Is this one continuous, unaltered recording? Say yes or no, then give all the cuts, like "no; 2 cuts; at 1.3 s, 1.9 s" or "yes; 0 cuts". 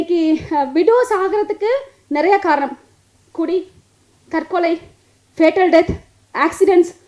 yes; 0 cuts